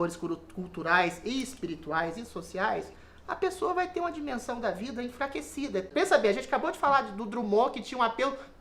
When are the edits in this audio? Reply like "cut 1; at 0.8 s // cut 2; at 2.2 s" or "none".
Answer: cut 1; at 5.9 s